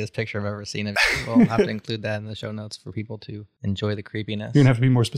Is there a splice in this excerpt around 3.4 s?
yes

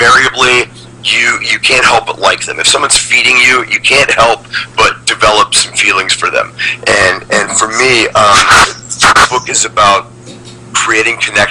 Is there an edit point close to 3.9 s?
no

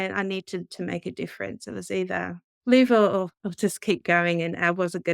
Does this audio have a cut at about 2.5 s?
yes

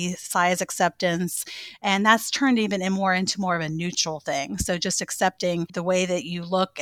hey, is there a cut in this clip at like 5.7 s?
yes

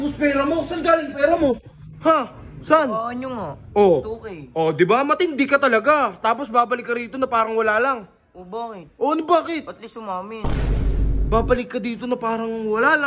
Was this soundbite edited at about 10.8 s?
yes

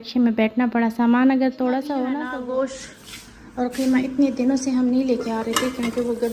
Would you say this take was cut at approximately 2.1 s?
yes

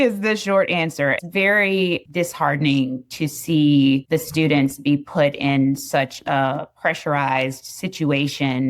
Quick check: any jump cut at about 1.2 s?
yes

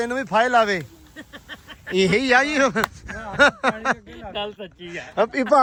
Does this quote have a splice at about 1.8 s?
no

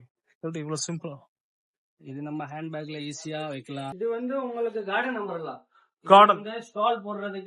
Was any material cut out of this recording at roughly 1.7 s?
no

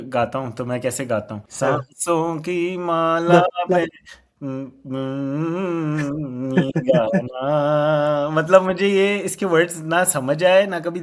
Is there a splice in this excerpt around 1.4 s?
yes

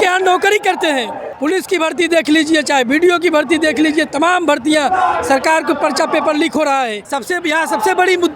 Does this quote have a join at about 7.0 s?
yes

